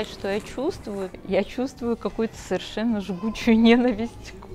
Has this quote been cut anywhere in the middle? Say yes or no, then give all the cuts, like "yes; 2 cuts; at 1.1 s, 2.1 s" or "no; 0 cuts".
yes; 1 cut; at 1.1 s